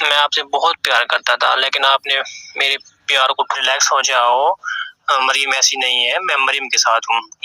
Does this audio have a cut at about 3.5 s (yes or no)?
yes